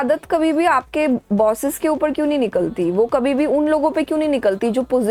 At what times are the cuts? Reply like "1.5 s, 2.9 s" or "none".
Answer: none